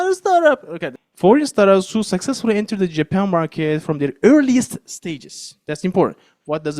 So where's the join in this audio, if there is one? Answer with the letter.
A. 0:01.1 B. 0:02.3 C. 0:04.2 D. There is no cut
A